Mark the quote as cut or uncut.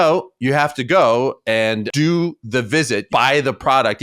cut